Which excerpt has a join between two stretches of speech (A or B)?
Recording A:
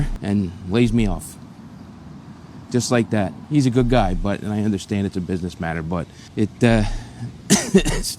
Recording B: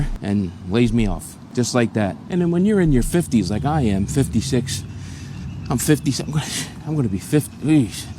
B